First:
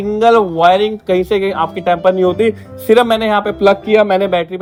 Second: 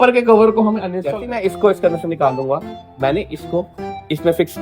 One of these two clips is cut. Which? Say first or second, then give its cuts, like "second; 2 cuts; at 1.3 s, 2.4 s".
second; 1 cut; at 1.0 s